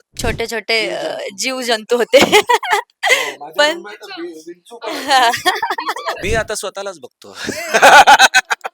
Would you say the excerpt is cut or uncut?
cut